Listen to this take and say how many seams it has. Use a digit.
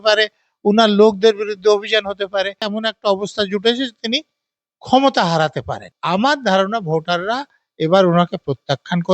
2